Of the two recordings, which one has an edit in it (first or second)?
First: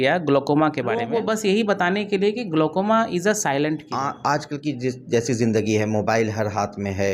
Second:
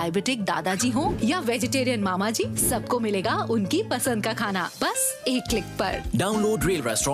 first